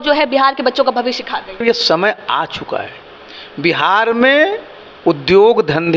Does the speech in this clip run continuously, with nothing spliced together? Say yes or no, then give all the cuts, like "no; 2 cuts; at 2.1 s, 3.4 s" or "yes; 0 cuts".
no; 1 cut; at 1.6 s